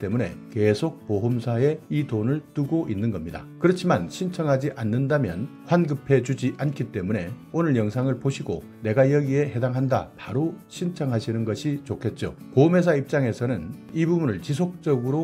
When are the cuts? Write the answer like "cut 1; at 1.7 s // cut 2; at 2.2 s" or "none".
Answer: none